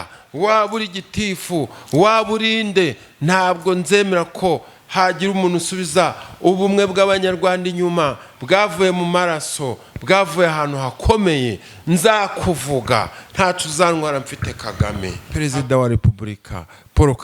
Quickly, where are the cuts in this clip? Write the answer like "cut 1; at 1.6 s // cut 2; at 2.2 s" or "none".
cut 1; at 15.2 s